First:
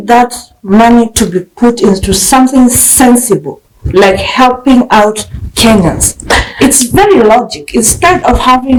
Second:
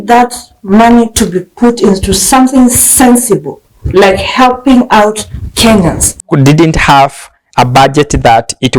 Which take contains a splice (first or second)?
second